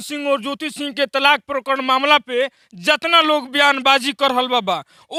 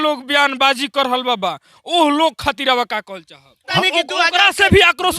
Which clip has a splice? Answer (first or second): second